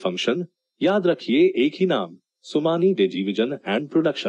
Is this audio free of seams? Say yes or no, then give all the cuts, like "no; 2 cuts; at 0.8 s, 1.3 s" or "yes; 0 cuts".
yes; 0 cuts